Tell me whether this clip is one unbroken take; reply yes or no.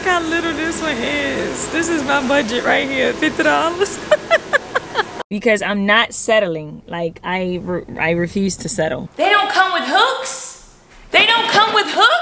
no